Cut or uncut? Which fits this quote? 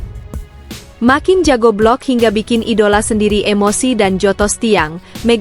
cut